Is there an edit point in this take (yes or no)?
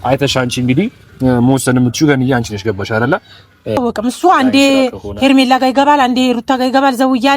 yes